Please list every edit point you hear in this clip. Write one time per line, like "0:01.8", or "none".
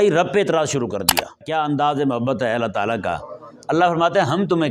0:01.4